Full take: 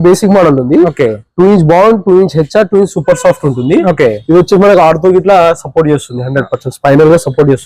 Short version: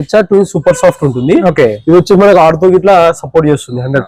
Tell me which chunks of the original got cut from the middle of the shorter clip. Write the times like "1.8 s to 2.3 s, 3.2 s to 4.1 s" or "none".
none